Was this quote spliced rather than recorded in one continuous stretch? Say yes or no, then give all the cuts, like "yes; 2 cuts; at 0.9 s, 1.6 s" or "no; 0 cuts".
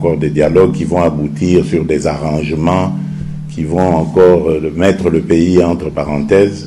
no; 0 cuts